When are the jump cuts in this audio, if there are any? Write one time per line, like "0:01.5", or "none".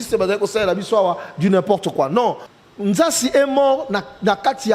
0:02.5

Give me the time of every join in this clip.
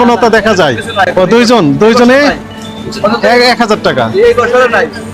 0:01.1

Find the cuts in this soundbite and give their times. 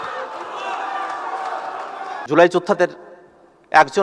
0:02.2

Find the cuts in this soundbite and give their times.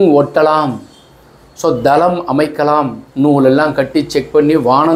0:03.0

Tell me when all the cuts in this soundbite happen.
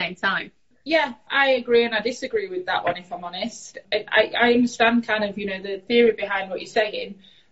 0:01.2
0:03.8
0:05.8

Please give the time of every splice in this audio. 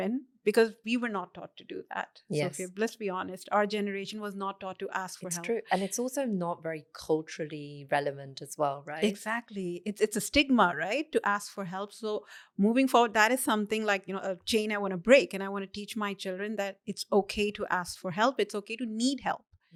none

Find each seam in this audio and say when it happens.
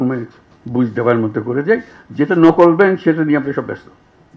none

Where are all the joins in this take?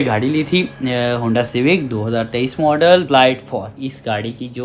0:03.7

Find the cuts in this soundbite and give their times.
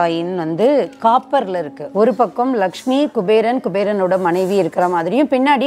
0:01.8

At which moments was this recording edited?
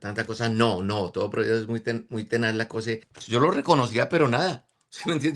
0:03.1

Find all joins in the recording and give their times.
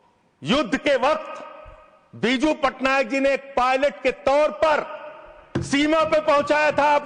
none

